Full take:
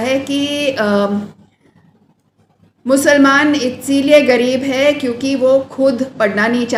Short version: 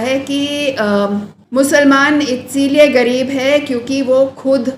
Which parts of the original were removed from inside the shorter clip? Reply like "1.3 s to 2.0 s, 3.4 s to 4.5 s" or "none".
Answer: 1.4 s to 2.7 s

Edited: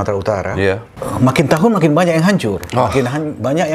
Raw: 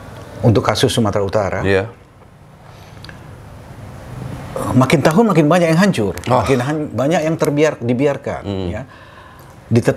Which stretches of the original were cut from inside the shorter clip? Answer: 2.0 s to 4.5 s

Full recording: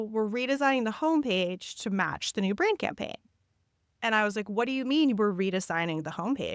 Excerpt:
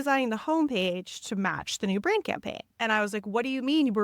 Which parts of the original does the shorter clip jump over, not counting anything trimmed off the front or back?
3.1 s to 3.8 s

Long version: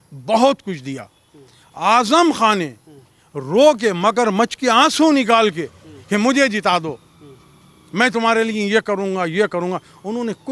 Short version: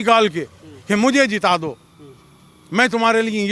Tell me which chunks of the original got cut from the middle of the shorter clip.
none

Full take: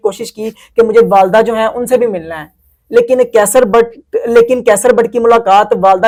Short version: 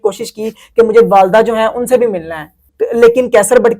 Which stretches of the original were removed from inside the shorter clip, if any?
2.7 s to 4.0 s

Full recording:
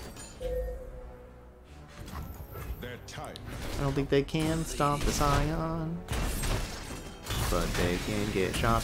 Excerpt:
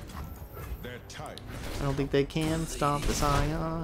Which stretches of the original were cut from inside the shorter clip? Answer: none

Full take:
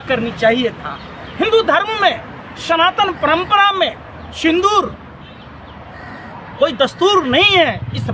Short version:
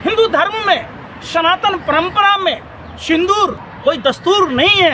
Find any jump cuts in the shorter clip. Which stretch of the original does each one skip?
5.0 s to 6.4 s

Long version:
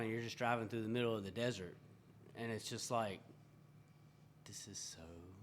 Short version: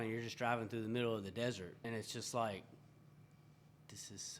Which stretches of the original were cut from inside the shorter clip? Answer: 1.7 s to 2.3 s

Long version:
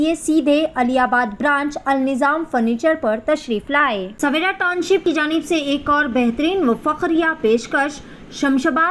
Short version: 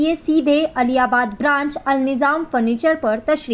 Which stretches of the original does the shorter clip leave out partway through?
none

